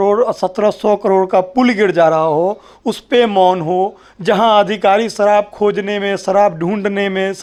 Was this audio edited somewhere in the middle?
no; 0 cuts

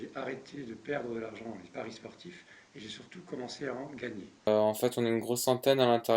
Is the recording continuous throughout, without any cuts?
no; 1 cut; at 4.5 s

